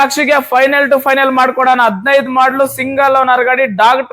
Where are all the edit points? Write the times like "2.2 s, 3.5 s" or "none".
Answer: none

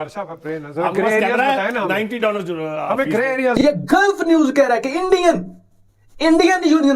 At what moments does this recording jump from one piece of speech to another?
3.5 s

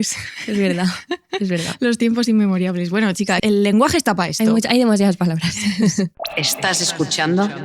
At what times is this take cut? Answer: 3.4 s, 6.1 s

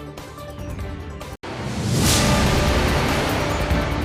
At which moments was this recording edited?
1.4 s

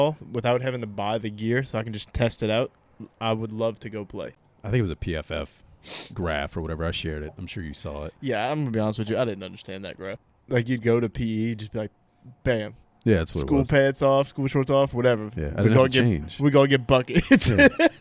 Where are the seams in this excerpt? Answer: 4.3 s, 10.1 s

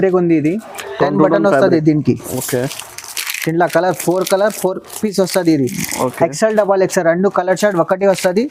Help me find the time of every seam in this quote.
none

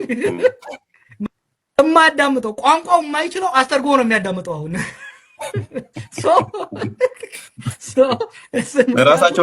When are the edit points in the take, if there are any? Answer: 1.2 s

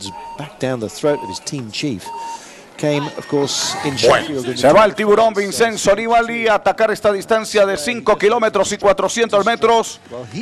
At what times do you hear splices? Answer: none

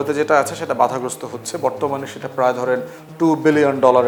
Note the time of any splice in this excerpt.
none

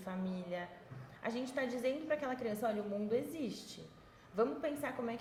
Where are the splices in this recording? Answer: none

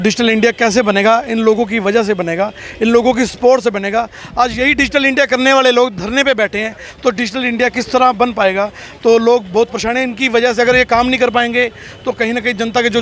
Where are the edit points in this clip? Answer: none

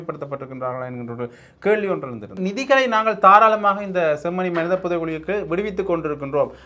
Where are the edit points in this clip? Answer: 2.3 s

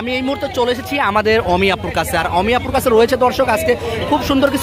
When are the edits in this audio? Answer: none

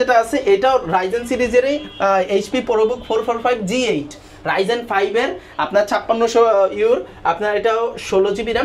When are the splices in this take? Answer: none

